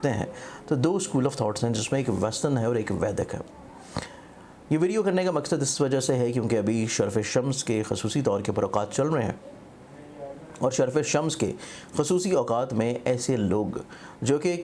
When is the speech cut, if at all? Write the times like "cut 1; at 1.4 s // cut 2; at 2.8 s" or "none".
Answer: none